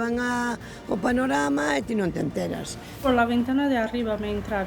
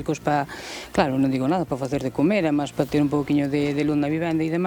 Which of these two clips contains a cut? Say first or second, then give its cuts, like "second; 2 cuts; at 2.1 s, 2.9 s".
first; 1 cut; at 2.9 s